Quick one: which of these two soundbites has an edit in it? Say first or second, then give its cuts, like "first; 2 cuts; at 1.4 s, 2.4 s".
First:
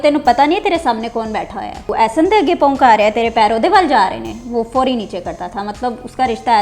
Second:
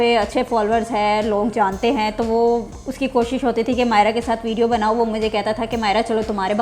first; 1 cut; at 1.9 s